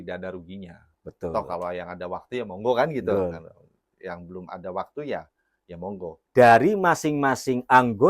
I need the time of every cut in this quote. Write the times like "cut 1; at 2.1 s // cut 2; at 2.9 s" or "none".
cut 1; at 6.2 s